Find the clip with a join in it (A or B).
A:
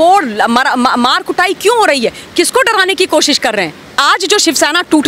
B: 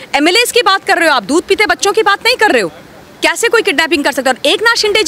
A